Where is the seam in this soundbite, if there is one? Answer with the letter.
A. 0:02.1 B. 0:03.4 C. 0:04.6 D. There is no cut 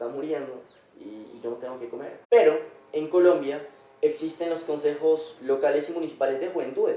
A